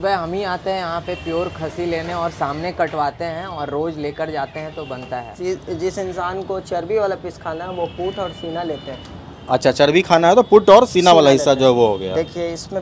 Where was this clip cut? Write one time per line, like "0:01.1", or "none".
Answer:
0:05.3

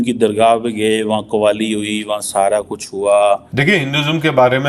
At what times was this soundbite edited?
0:03.5

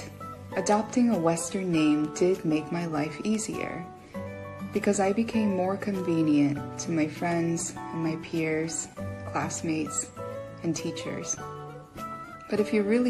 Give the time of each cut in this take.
none

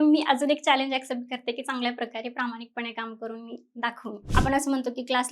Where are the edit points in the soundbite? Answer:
0:04.2

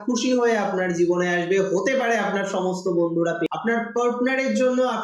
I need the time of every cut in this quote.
0:03.5

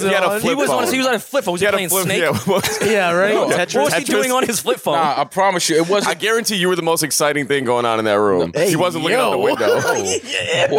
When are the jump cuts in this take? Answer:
none

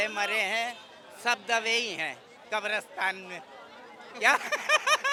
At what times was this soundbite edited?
none

